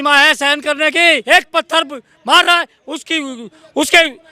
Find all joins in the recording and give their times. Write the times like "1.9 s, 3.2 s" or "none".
1.2 s

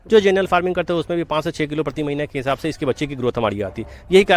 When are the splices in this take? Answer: none

